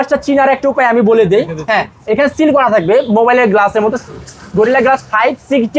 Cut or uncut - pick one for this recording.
uncut